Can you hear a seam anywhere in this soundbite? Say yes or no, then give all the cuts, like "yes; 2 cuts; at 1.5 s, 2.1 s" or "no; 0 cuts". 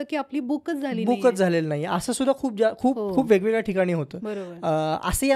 no; 0 cuts